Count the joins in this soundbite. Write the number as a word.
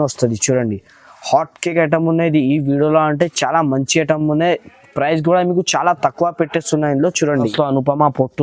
one